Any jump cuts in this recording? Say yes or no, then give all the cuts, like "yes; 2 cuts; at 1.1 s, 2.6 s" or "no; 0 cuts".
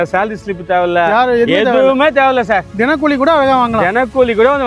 no; 0 cuts